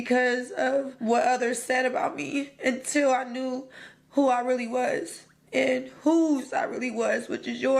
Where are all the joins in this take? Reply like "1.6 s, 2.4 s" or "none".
0.9 s